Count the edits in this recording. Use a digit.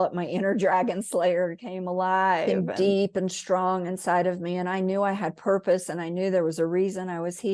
1